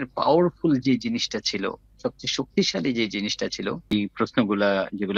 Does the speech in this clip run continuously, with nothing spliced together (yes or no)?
no